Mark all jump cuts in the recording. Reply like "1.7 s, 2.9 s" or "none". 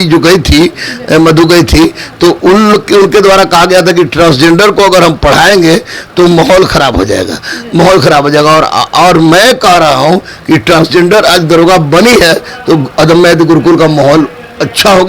none

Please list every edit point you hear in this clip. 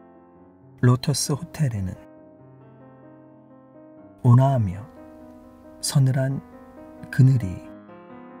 0.8 s, 2.0 s, 4.2 s, 7.6 s

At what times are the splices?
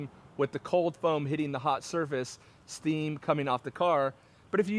none

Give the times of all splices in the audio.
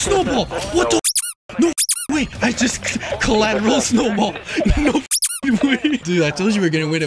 2.3 s, 6.0 s

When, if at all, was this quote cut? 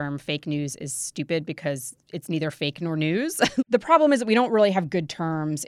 3.6 s

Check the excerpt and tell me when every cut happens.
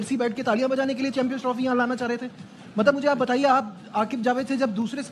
none

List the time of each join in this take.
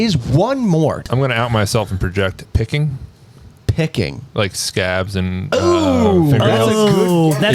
1.0 s

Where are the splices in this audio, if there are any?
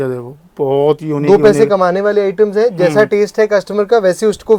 none

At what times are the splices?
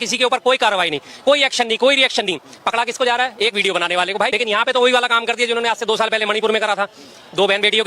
4.3 s

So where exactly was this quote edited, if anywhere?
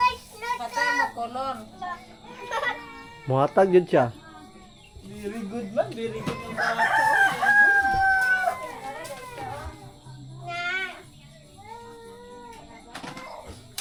none

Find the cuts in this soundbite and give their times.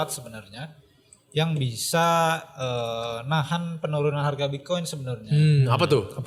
none

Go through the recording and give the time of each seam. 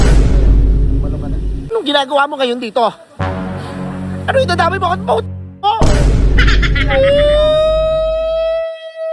1.7 s

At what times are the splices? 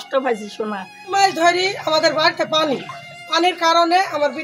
1.0 s

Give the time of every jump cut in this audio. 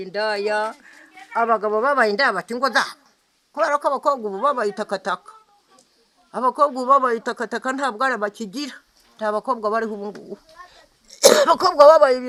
none

